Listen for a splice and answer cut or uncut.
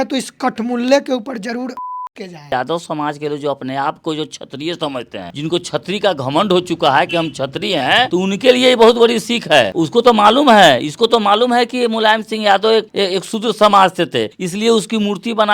cut